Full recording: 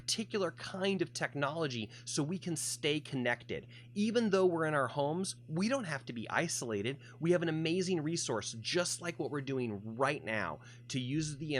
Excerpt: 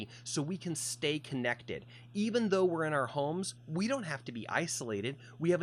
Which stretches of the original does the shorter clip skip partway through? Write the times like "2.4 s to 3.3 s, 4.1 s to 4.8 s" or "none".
none